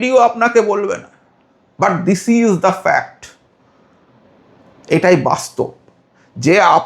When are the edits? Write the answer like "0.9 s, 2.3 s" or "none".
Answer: none